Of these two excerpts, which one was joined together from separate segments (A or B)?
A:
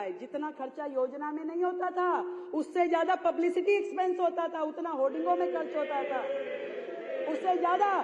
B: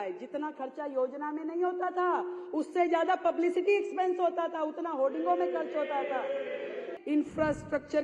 B